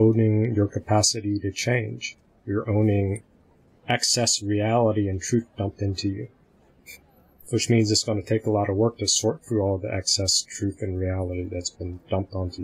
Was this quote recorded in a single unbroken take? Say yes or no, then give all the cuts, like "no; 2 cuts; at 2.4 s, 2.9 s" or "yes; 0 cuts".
yes; 0 cuts